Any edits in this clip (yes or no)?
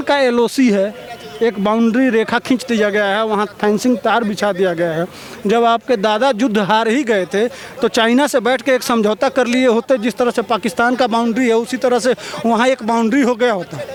no